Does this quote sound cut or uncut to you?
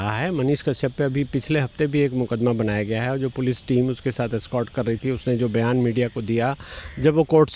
uncut